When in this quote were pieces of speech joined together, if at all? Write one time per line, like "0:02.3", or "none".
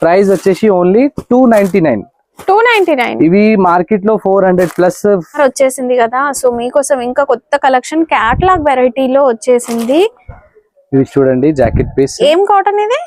0:05.4